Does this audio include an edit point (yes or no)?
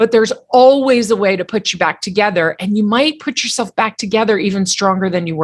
no